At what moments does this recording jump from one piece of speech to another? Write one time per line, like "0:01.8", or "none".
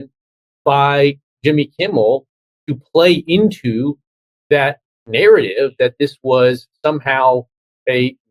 none